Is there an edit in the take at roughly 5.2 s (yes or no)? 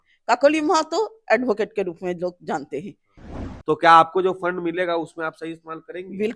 no